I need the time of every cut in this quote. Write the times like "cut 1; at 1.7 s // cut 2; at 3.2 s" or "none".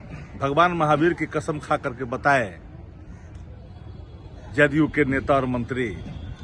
none